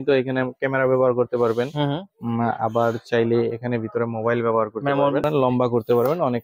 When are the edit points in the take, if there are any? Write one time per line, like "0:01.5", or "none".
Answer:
0:05.2